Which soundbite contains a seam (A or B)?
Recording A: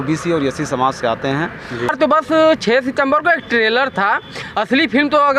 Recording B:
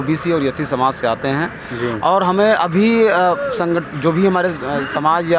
A